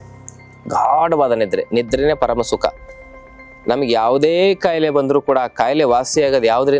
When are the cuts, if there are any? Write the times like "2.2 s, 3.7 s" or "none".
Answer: none